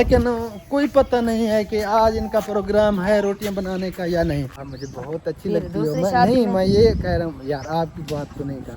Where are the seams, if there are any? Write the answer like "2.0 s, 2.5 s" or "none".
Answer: 4.6 s